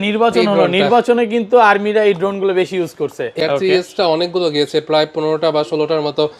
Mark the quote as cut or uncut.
cut